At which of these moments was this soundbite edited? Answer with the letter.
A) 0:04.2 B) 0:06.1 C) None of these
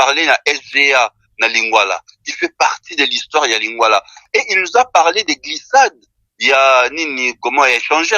A